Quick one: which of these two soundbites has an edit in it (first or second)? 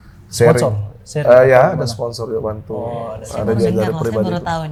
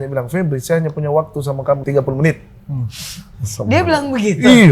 second